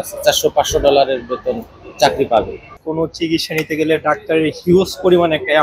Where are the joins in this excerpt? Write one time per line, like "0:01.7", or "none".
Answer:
0:02.8